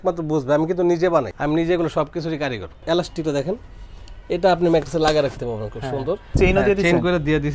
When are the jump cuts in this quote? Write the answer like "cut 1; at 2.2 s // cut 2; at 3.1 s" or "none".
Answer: cut 1; at 1.3 s // cut 2; at 2.8 s // cut 3; at 6.3 s